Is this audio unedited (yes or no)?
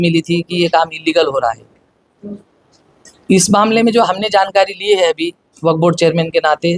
yes